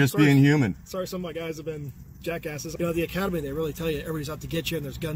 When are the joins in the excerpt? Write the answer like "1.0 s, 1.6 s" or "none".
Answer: 2.6 s